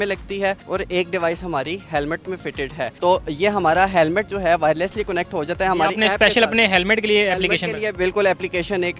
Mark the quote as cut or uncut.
uncut